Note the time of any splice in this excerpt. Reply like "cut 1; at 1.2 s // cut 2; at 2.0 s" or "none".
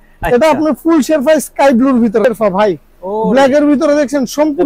cut 1; at 2.2 s